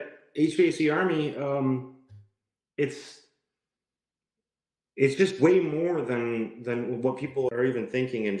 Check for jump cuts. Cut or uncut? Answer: cut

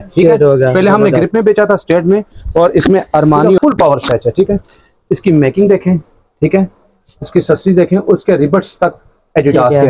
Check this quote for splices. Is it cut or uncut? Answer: cut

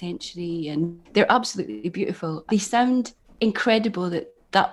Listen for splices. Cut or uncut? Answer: cut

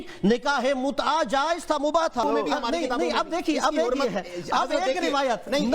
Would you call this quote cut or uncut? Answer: cut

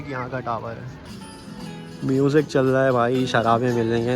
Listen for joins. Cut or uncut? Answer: cut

